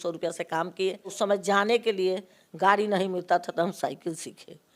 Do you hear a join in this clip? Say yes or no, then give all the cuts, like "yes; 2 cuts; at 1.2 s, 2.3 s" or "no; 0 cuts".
yes; 1 cut; at 1.1 s